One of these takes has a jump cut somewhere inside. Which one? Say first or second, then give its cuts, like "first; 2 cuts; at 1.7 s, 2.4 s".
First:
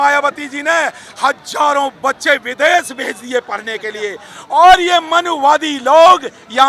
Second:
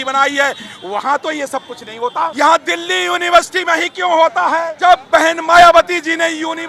second; 2 cuts; at 2.3 s, 4.7 s